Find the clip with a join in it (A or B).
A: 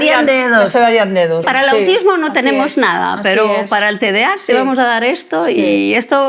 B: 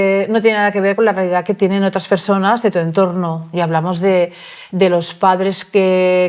A